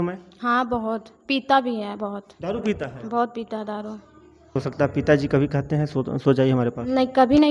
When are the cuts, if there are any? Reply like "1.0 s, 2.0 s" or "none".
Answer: 4.5 s